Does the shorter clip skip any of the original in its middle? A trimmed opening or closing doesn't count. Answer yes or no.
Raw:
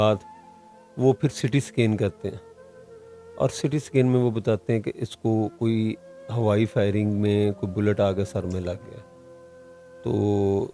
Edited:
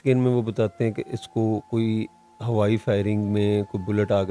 no